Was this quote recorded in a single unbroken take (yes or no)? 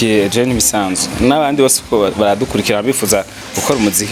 yes